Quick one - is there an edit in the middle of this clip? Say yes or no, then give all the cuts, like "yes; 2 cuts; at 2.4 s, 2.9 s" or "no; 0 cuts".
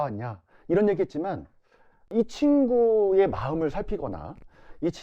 yes; 1 cut; at 2.1 s